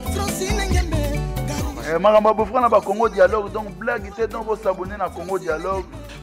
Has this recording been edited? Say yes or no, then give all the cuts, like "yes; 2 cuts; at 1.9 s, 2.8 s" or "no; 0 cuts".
yes; 1 cut; at 1.0 s